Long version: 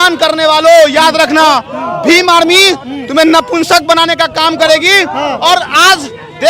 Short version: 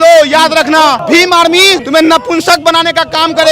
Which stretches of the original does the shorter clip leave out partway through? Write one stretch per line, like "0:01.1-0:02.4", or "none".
0:01.6-0:02.0
0:02.8-0:03.1

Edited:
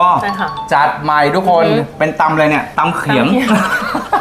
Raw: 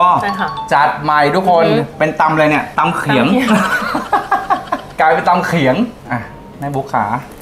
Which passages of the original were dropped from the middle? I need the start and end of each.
none

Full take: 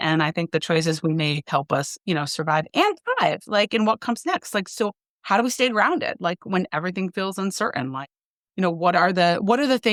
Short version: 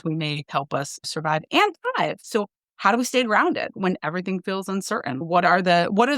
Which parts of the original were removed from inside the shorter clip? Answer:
0:02.0-0:02.3
0:03.5-0:04.7
0:06.2-0:06.4
0:07.9-0:08.8

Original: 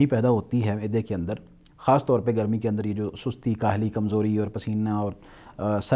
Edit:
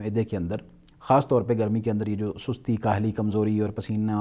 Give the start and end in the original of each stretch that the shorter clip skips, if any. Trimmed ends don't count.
none

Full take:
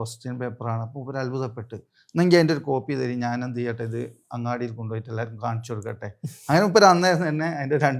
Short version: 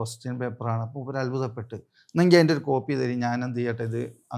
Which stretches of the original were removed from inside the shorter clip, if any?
none

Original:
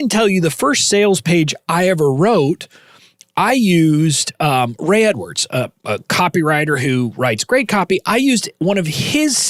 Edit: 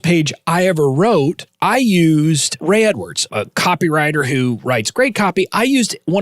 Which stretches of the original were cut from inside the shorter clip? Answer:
0:02.7-0:03.2
0:04.3-0:04.7
0:05.4-0:05.8

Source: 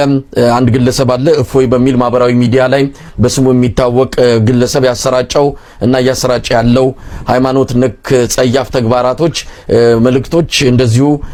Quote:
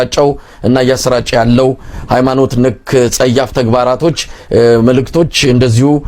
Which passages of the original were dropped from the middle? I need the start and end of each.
none

